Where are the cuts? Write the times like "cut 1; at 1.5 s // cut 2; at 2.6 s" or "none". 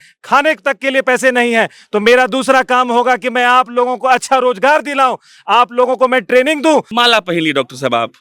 cut 1; at 6.9 s